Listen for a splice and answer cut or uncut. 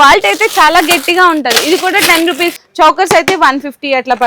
cut